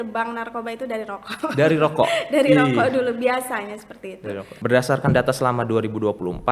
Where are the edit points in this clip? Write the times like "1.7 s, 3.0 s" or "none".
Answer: 4.5 s